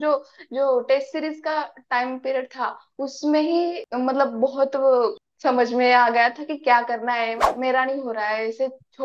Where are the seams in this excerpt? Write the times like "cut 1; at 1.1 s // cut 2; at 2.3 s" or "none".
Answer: cut 1; at 3.8 s // cut 2; at 5.2 s // cut 3; at 7.5 s